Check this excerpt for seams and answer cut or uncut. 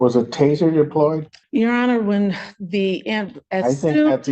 cut